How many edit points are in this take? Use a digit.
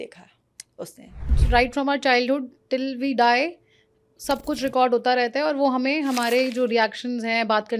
1